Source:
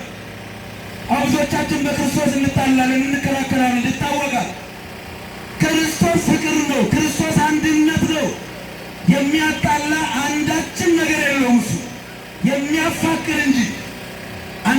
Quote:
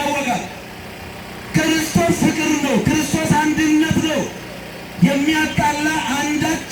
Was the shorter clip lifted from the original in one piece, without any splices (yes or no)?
yes